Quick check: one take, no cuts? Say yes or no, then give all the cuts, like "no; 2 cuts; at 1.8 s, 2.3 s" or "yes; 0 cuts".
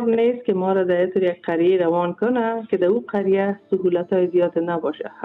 yes; 0 cuts